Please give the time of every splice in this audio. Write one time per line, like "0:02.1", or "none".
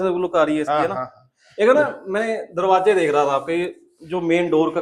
none